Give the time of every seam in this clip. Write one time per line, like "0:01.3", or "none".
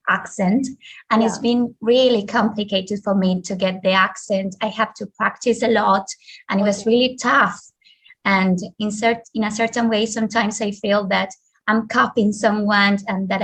none